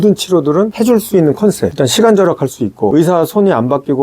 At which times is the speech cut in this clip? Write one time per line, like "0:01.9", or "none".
0:01.7